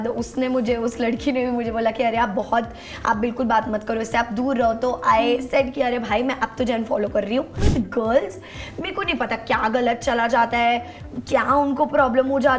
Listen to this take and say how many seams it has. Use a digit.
1